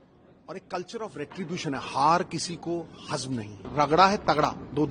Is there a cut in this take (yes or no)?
yes